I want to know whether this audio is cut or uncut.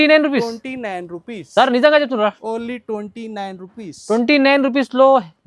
uncut